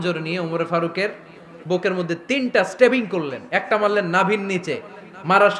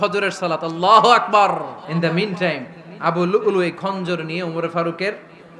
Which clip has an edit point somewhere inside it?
second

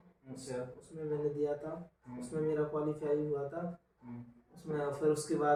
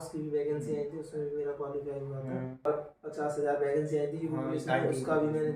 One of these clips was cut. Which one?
second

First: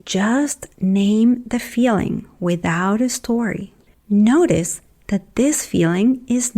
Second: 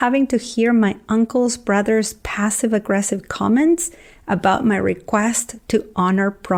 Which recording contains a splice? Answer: first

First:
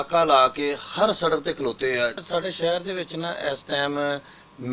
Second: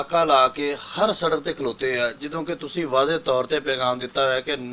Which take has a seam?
first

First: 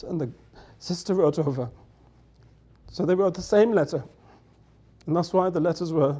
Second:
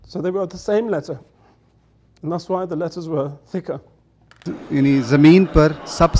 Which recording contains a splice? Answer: second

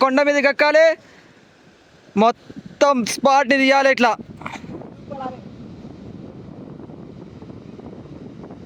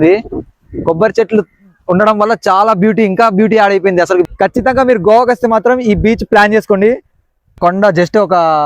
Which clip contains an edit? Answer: second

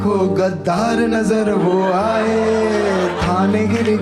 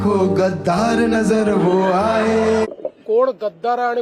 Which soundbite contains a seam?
second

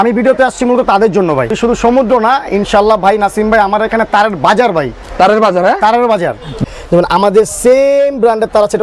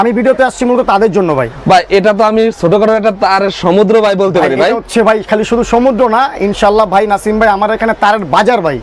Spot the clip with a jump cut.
first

